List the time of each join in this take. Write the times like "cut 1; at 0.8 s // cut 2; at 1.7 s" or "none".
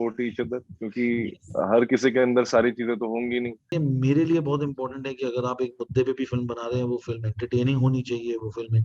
cut 1; at 3.7 s